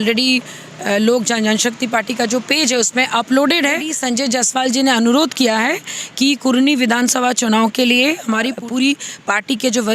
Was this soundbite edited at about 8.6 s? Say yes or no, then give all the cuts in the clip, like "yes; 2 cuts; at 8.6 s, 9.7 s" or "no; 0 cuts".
yes; 2 cuts; at 3.9 s, 8.6 s